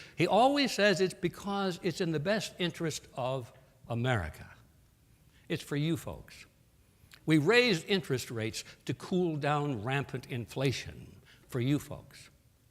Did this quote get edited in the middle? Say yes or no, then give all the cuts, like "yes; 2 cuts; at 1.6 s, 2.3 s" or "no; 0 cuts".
yes; 1 cut; at 10.4 s